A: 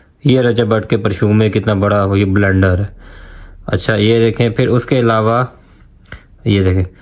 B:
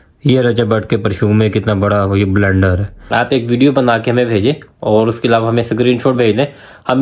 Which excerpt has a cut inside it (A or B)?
B